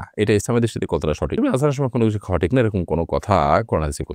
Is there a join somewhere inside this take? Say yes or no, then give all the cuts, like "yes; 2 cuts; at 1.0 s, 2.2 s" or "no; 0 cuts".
no; 0 cuts